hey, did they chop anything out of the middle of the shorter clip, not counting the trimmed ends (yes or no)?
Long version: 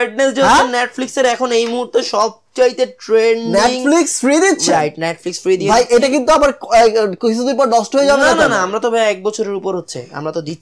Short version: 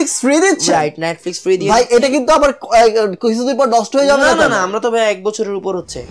no